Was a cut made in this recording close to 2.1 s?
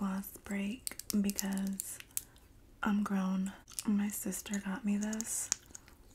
no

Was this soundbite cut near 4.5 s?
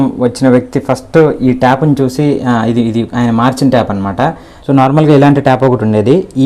yes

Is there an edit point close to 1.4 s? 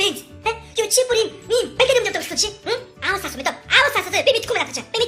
no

